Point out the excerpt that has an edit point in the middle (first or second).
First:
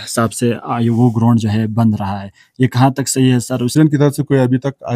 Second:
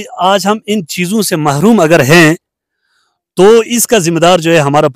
first